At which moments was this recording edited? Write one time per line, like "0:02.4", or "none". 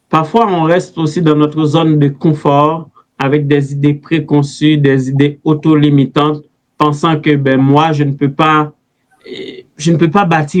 none